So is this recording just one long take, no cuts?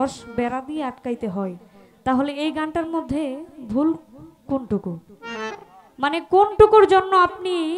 yes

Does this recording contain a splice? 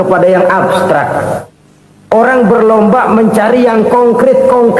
no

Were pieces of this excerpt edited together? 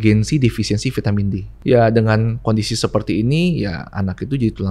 yes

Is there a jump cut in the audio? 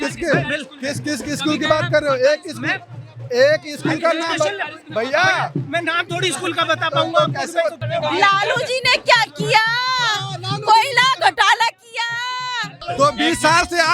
yes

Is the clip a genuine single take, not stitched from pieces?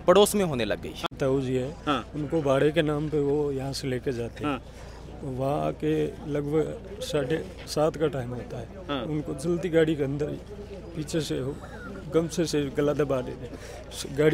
no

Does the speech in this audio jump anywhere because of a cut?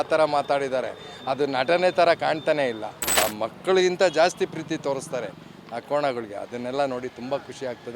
yes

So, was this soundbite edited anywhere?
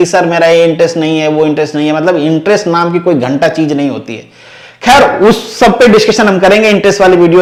no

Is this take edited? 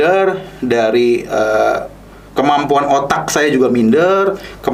no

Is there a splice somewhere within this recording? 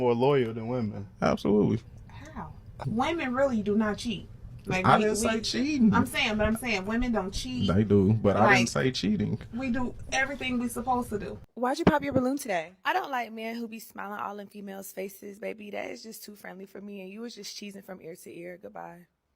yes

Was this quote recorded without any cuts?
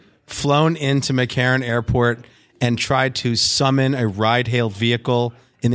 yes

